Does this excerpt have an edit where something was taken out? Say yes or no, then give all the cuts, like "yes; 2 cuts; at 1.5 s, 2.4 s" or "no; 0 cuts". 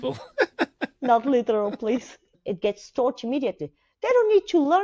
yes; 1 cut; at 2.2 s